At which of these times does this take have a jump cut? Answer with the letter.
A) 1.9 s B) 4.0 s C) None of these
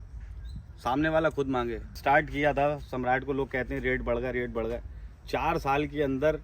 A